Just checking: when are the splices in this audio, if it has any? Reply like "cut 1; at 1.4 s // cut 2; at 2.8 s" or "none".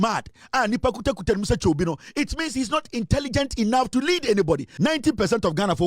cut 1; at 4.7 s